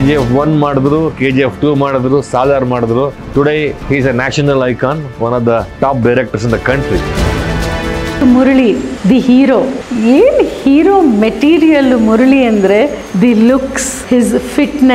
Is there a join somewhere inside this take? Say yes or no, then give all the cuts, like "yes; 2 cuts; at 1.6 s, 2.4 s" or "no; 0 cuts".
yes; 1 cut; at 14.0 s